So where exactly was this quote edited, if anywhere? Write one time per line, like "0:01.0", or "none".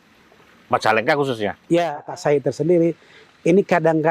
0:02.0